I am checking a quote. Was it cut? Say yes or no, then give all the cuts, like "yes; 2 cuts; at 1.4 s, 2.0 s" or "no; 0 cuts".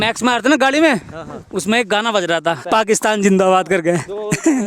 yes; 1 cut; at 2.6 s